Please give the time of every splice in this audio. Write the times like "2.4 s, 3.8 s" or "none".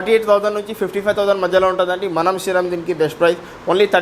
none